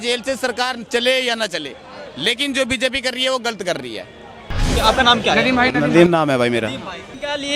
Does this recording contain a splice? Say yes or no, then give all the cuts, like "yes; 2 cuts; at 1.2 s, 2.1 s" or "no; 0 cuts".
yes; 1 cut; at 4.6 s